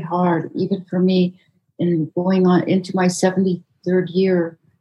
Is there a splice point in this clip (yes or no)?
no